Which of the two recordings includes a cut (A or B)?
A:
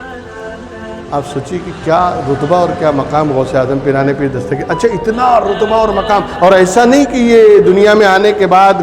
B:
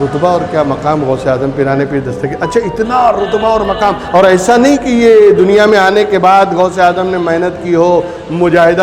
A